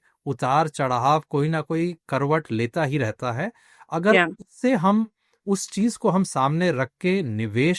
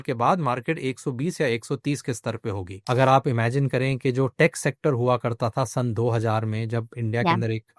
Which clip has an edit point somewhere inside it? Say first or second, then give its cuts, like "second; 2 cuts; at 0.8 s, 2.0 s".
second; 1 cut; at 2.7 s